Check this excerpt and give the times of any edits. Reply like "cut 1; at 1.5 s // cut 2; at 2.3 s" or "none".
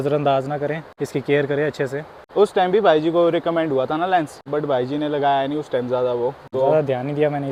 none